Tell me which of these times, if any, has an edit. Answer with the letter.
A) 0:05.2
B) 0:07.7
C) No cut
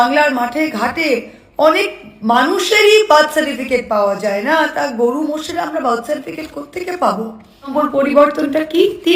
B